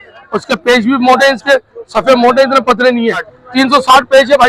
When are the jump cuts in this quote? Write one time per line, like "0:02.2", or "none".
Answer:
0:03.4